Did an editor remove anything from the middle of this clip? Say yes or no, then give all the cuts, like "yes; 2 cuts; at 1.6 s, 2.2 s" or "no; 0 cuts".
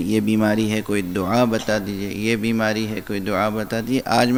no; 0 cuts